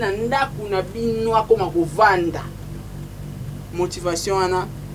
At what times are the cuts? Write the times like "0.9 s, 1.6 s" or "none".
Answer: none

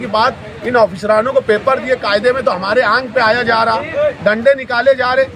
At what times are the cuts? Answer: none

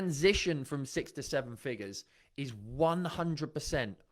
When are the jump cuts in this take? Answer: none

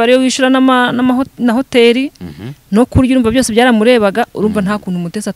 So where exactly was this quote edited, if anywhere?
none

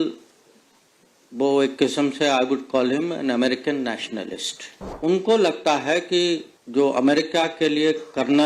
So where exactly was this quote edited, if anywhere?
4.8 s, 6.6 s

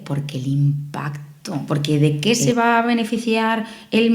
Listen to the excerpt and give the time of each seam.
1.6 s

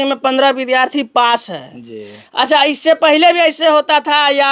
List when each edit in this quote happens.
none

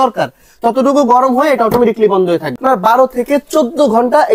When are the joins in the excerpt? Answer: 2.6 s

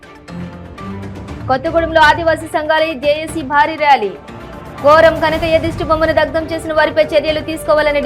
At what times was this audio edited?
1.4 s

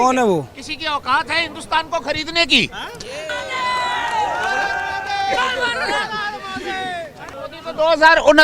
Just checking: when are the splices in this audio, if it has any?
7.4 s

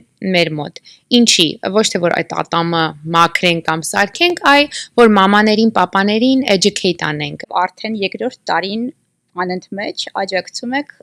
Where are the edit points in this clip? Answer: 7.4 s

